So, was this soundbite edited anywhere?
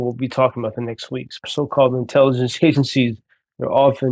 yes; 1 cut; at 1.4 s

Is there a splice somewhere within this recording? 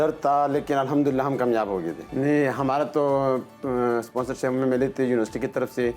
yes; 1 cut; at 2.0 s

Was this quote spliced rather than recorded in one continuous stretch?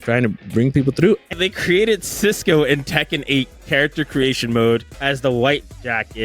yes; 2 cuts; at 1.3 s, 4.9 s

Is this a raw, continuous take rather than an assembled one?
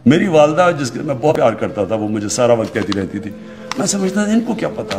no; 1 cut; at 1.3 s

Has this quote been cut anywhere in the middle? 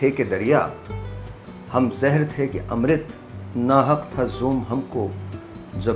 no; 0 cuts

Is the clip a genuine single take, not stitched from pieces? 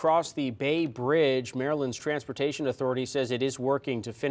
yes; 0 cuts

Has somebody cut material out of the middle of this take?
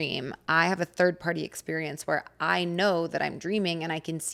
no; 0 cuts

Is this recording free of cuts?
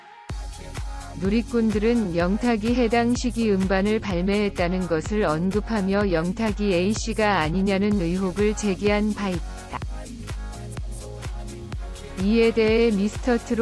no; 3 cuts; at 1.2 s, 9.4 s, 11.7 s

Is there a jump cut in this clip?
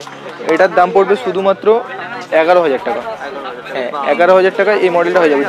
no; 0 cuts

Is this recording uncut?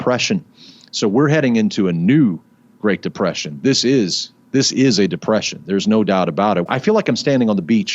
no; 1 cut; at 6.7 s

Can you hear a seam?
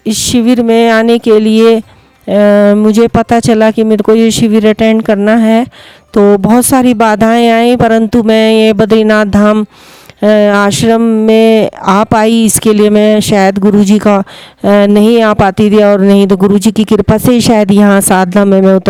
no; 0 cuts

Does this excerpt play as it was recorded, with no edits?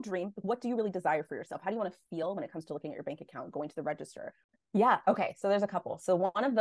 no; 1 cut; at 4.5 s

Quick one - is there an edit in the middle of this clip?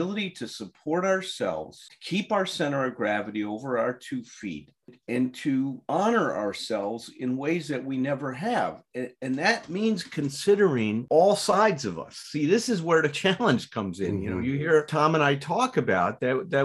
no; 0 cuts

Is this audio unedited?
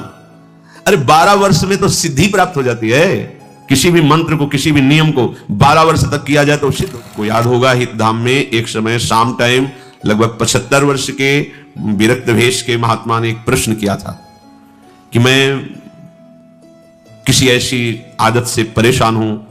no; 1 cut; at 6.8 s

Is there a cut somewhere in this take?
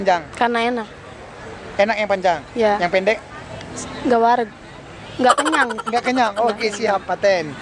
no; 0 cuts

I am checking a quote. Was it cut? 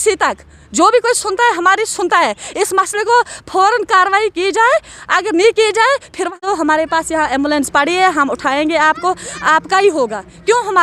yes; 1 cut; at 6.4 s

